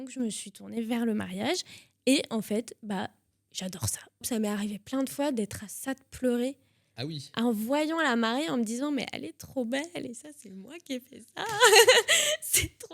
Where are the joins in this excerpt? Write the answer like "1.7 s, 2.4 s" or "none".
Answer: 4.2 s